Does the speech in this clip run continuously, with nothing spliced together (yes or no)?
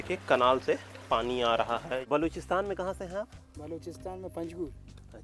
no